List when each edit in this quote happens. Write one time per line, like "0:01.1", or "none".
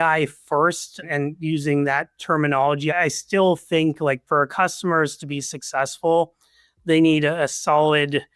0:01.0
0:02.9
0:04.2